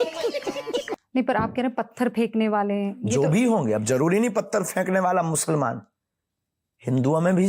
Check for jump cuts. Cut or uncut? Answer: cut